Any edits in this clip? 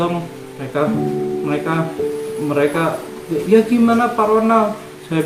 no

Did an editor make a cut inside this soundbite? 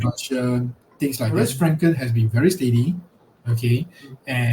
yes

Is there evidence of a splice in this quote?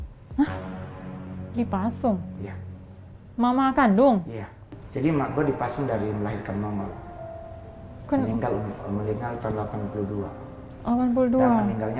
no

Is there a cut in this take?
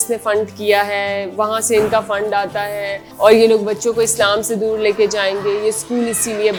no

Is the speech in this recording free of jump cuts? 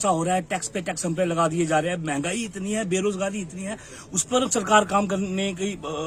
yes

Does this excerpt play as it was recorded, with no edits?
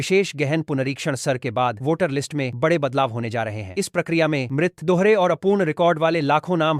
yes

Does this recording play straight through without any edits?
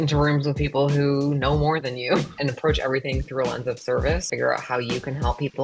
no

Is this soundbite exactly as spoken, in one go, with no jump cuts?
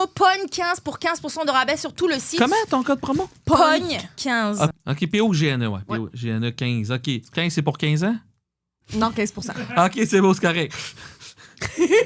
no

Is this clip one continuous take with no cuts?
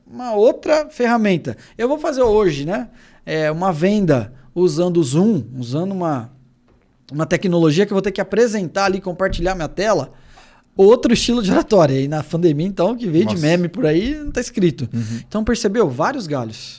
yes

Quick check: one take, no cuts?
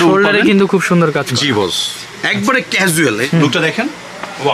no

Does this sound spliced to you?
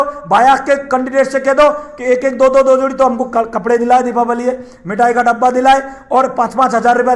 no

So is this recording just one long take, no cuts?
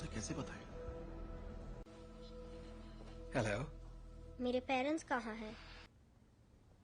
no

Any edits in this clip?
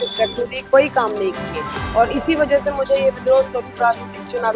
no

